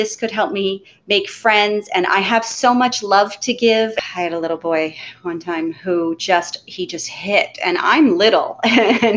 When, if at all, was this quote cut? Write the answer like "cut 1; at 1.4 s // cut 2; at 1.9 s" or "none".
cut 1; at 3.9 s